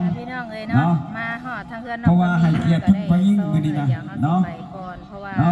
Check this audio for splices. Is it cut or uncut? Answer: uncut